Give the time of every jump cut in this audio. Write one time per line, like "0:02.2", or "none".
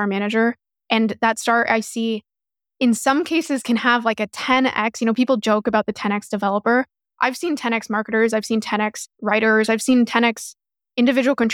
0:09.1